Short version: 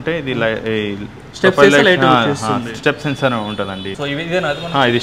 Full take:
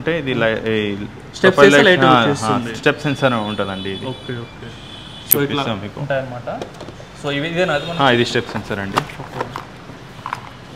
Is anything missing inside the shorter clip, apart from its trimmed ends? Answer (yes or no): yes